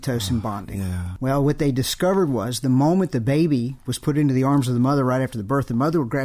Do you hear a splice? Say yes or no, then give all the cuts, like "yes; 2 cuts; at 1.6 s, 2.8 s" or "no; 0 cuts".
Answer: yes; 1 cut; at 1.1 s